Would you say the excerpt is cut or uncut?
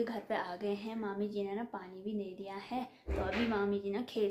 uncut